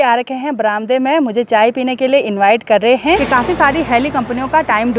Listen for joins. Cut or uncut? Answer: cut